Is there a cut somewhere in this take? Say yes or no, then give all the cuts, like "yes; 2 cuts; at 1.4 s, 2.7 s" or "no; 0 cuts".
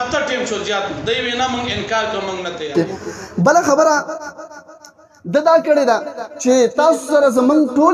yes; 1 cut; at 2.7 s